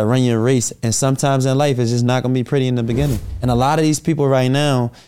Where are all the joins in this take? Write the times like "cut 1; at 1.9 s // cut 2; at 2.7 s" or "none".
cut 1; at 3.3 s